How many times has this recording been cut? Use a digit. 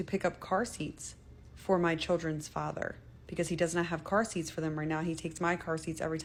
0